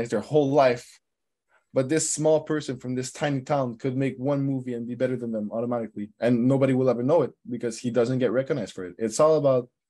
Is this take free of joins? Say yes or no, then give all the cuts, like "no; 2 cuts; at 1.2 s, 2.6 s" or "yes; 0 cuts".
yes; 0 cuts